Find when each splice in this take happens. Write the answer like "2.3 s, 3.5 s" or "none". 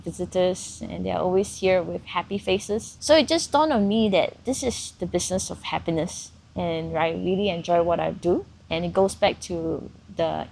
2.9 s, 8.6 s